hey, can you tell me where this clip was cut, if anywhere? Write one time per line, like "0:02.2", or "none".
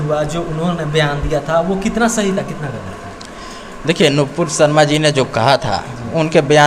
none